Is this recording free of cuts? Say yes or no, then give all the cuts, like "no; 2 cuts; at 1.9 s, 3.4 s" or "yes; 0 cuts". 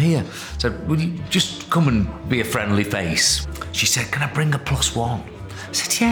no; 1 cut; at 3.6 s